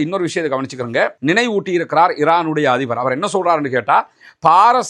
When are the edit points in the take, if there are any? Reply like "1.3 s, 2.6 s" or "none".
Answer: 1.2 s